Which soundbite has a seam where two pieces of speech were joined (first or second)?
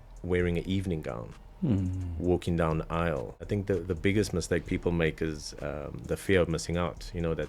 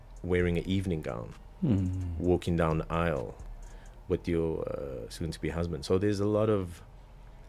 first